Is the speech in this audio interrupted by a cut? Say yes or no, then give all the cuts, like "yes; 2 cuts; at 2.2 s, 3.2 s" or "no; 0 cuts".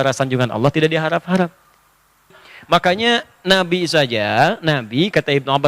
yes; 1 cut; at 2.3 s